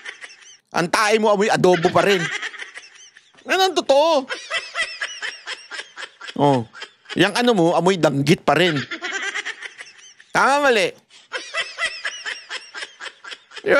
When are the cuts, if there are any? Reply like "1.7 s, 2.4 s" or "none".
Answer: none